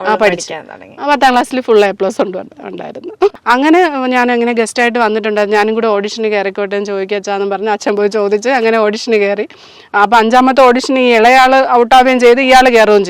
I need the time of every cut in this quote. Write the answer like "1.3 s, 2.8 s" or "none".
3.4 s